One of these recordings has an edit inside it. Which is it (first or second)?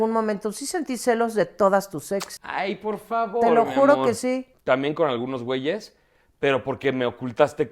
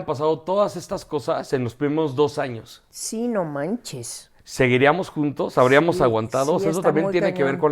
first